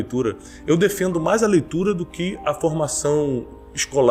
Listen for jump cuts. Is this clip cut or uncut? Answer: uncut